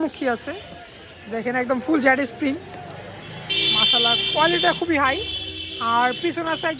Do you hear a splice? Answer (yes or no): no